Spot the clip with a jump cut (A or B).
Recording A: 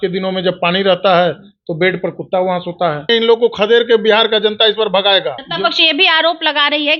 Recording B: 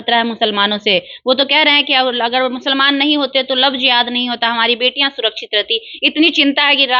A